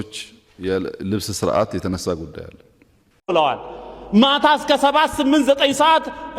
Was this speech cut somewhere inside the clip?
yes; 1 cut; at 3.1 s

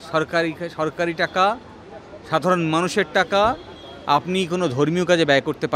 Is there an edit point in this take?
no; 0 cuts

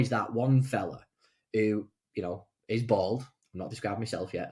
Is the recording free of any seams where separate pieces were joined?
no; 1 cut; at 3.4 s

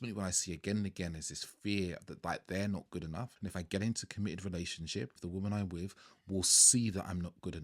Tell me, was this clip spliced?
yes; 3 cuts; at 2.1 s, 3.3 s, 5.2 s

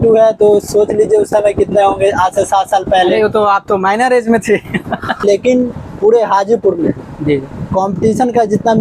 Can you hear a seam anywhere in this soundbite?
yes; 1 cut; at 5.2 s

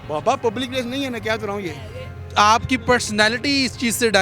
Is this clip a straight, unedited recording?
no; 1 cut; at 2.3 s

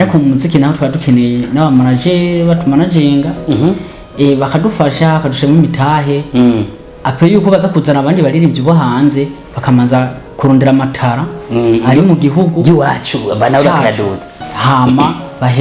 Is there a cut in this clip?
no; 0 cuts

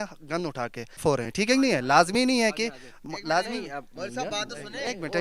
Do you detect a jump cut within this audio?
yes; 1 cut; at 1.0 s

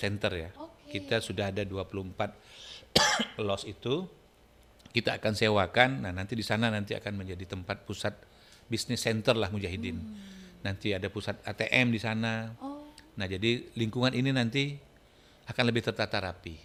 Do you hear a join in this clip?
no; 0 cuts

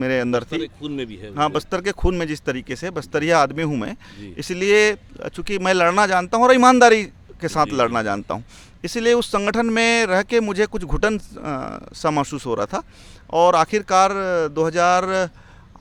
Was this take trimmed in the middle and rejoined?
no; 0 cuts

